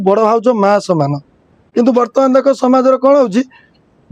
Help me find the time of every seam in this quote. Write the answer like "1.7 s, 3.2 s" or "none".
1.5 s

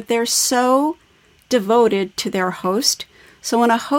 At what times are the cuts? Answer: none

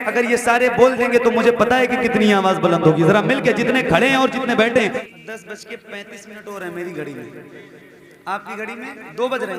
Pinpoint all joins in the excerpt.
5.0 s

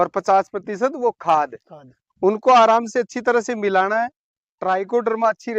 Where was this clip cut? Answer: 4.2 s

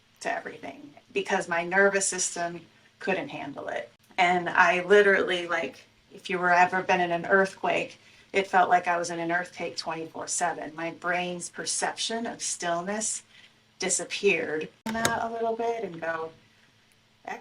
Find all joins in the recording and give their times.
3.9 s, 14.9 s

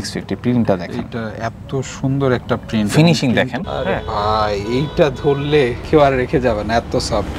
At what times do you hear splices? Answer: 3.6 s

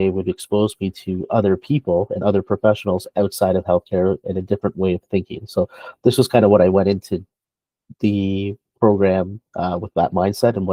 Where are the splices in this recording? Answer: none

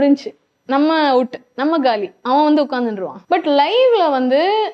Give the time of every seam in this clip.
3.1 s

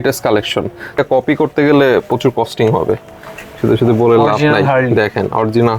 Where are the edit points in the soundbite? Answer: 1.0 s

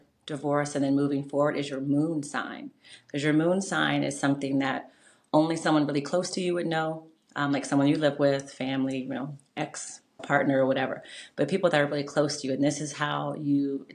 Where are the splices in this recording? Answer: 10.2 s

